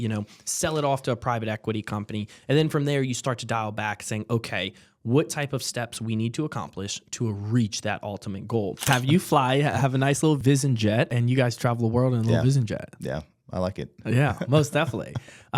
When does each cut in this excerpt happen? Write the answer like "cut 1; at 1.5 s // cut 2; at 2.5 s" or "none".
cut 1; at 8.9 s // cut 2; at 10.4 s // cut 3; at 11.2 s